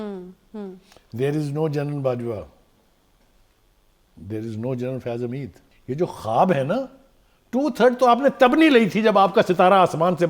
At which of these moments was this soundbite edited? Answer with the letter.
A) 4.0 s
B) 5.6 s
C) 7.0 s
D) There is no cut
B